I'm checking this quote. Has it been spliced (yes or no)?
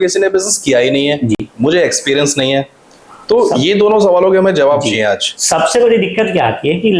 no